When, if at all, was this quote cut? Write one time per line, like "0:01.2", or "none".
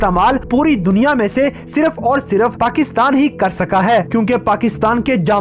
none